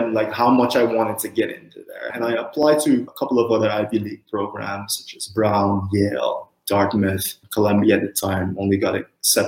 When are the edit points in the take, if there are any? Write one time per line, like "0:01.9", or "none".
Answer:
0:02.1
0:03.1